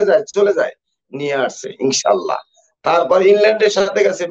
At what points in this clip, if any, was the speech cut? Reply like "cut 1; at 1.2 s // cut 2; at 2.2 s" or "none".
none